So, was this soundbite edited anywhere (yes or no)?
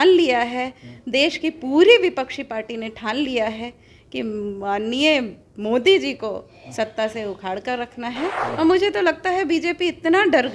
yes